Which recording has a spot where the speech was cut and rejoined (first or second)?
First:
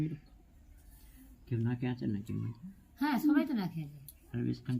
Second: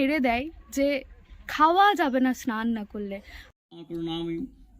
second